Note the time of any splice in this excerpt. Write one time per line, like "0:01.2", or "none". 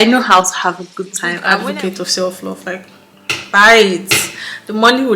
0:01.4